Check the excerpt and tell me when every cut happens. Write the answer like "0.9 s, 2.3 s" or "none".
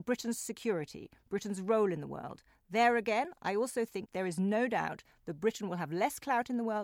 4.0 s